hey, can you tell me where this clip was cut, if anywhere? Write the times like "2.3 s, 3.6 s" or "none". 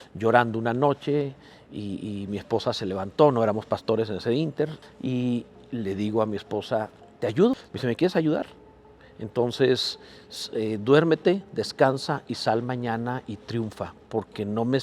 4.8 s, 7.5 s